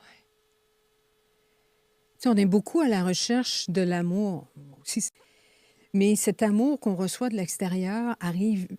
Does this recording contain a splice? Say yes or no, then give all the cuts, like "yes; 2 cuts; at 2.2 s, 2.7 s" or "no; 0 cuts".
yes; 1 cut; at 5.2 s